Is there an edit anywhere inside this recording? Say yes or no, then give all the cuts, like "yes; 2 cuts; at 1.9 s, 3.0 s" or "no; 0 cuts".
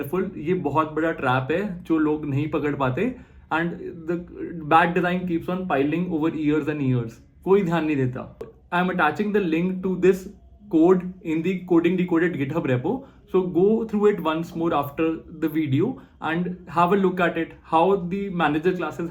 yes; 1 cut; at 8.6 s